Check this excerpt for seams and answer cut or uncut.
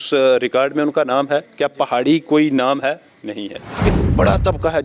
cut